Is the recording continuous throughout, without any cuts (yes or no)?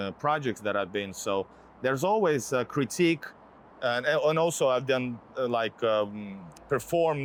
yes